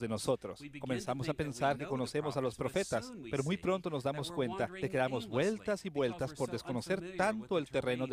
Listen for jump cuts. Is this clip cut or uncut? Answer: uncut